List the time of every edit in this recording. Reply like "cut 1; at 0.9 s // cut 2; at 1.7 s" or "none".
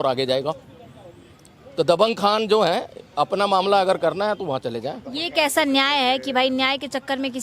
none